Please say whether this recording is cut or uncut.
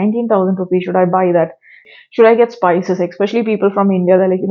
cut